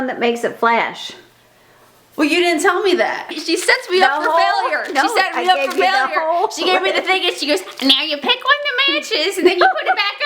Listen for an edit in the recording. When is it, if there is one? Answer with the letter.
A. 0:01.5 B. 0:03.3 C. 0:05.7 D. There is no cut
B